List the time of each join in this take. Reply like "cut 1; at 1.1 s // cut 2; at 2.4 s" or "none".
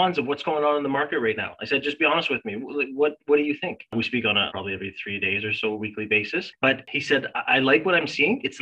cut 1; at 4.2 s // cut 2; at 6.9 s